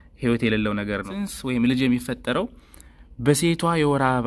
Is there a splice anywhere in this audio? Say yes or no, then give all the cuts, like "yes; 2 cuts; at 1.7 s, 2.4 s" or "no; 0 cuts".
yes; 1 cut; at 1.1 s